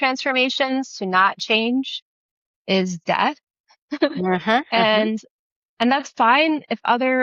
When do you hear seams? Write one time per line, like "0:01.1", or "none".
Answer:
none